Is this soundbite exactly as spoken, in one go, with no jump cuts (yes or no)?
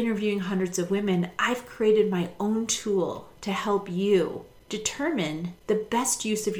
no